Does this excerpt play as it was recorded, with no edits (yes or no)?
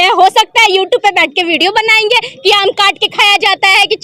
yes